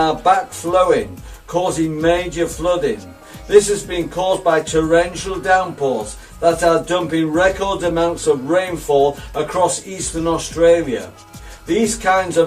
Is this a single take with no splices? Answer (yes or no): no